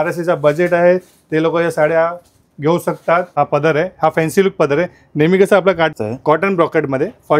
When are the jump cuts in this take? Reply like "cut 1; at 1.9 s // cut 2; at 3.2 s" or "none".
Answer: cut 1; at 3.3 s // cut 2; at 5.9 s